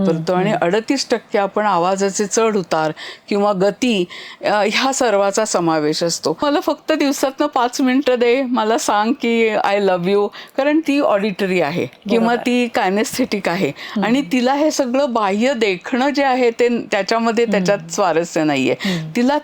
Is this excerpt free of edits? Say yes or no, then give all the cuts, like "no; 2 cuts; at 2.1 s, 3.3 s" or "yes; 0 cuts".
no; 1 cut; at 6.4 s